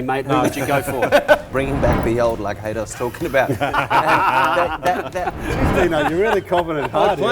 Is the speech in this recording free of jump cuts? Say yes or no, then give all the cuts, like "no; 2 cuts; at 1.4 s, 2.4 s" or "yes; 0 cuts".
no; 2 cuts; at 1.4 s, 5.4 s